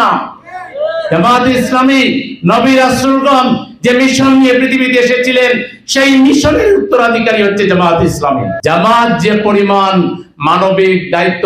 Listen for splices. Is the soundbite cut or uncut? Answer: cut